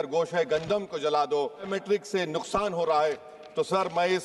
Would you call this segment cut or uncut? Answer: cut